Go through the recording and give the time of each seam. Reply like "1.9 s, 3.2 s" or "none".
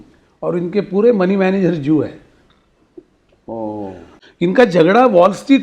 4.1 s